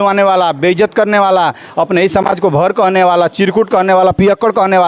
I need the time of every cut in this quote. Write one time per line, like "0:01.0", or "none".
none